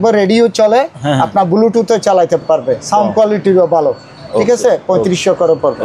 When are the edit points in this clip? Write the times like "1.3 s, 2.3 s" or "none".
none